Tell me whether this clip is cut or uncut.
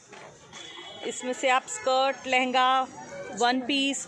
uncut